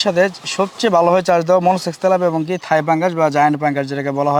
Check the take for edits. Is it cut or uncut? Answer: uncut